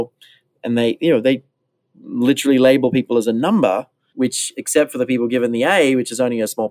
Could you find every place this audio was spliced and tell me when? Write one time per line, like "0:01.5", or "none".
0:04.0